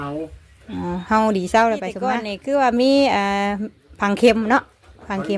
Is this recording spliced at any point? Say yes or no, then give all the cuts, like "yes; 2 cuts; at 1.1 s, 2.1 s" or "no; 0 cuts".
yes; 1 cut; at 2.3 s